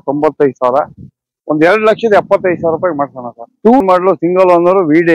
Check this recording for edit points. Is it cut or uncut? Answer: cut